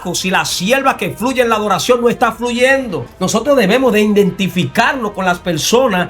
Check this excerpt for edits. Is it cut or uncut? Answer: cut